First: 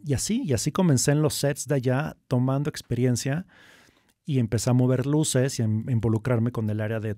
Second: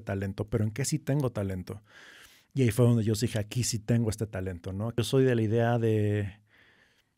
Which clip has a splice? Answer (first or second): second